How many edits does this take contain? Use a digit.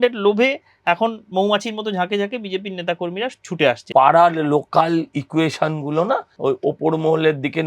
2